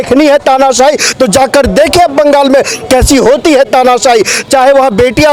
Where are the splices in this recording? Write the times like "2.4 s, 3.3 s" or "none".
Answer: none